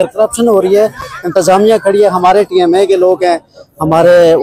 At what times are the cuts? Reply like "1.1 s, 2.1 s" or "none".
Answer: none

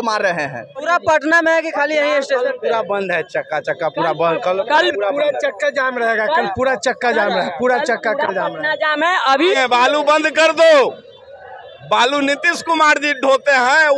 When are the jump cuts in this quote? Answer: 0.8 s, 9.6 s

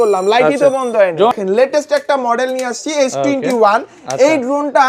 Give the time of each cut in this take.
1.3 s

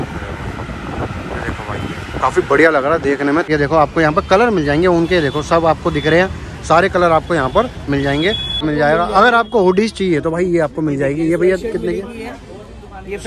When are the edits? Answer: 3.5 s, 8.6 s

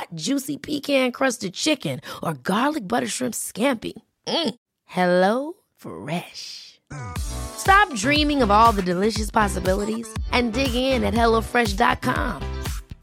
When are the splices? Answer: none

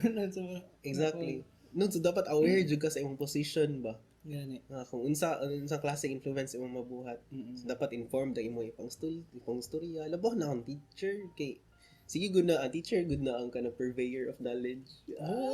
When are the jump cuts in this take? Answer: none

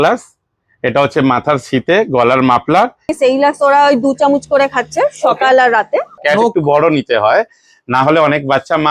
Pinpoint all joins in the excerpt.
3.1 s, 6.1 s

